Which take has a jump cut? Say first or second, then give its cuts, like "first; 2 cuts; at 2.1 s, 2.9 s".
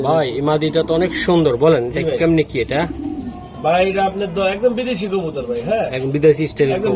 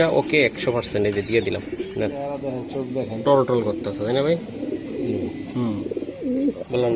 second; 2 cuts; at 2.4 s, 6.0 s